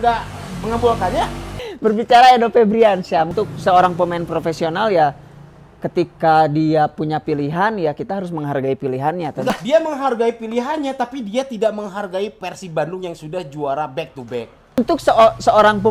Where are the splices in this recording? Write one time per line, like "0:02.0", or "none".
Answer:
0:01.5
0:03.3
0:09.5
0:14.8